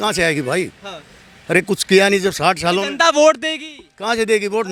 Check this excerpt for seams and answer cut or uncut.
uncut